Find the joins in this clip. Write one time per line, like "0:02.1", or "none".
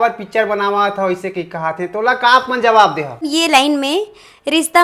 0:03.2